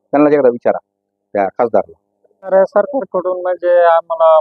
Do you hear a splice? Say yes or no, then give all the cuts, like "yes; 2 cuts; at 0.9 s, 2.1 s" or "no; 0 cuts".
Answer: yes; 1 cut; at 2.5 s